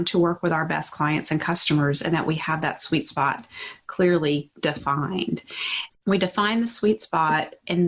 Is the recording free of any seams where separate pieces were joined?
no; 1 cut; at 5.8 s

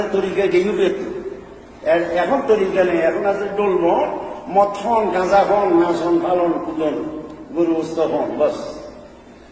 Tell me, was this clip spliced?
no; 0 cuts

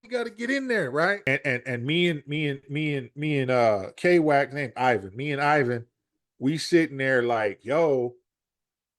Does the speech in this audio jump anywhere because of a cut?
yes; 1 cut; at 1.2 s

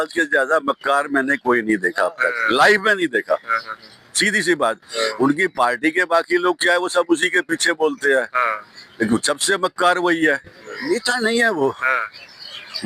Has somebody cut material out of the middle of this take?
yes; 1 cut; at 10.9 s

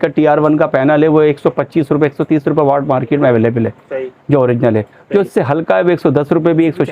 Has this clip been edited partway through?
no; 0 cuts

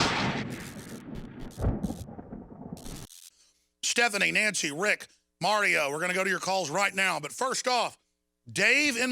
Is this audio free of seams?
yes; 0 cuts

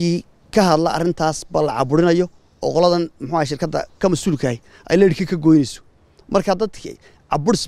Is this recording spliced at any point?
no; 0 cuts

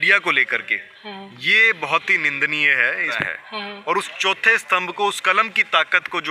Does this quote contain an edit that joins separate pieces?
yes; 1 cut; at 3.3 s

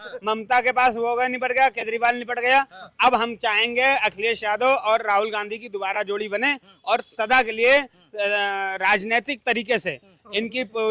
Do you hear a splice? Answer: no; 0 cuts

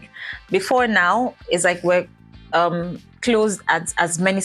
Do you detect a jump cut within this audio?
no; 0 cuts

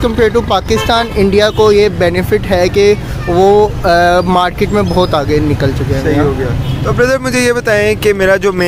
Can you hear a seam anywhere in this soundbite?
no; 0 cuts

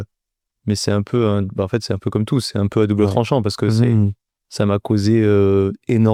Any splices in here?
no; 0 cuts

